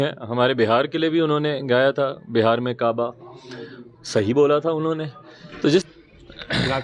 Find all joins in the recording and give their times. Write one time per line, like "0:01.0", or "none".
0:05.9